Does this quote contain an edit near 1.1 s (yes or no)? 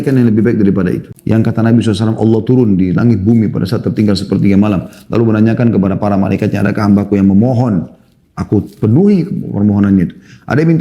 yes